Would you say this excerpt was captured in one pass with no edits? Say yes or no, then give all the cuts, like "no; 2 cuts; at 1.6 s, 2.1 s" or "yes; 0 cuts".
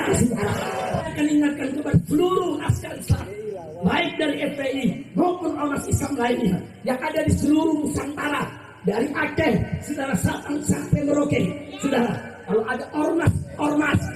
no; 1 cut; at 1.0 s